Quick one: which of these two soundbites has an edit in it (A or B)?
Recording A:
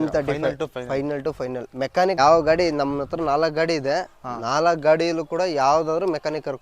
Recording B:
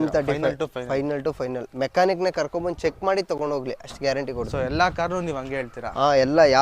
A